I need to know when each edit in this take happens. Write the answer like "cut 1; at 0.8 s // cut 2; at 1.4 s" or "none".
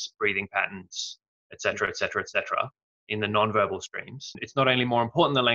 cut 1; at 4.4 s